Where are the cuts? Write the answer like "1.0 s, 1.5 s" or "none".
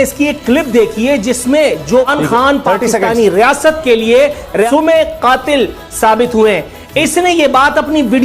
2.1 s, 4.7 s